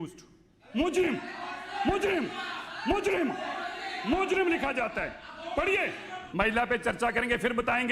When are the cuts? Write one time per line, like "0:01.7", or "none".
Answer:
0:06.2